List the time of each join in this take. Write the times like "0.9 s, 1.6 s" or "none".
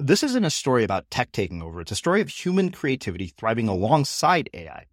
none